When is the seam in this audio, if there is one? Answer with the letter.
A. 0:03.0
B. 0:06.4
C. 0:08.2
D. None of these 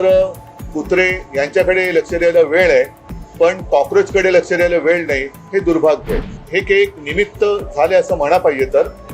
B